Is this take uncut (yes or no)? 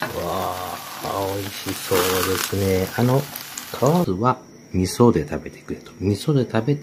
no